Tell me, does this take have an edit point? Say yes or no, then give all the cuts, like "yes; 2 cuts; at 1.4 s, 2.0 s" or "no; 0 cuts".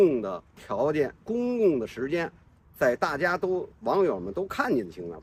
no; 0 cuts